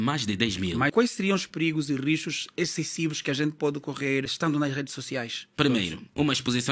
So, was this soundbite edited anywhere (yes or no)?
yes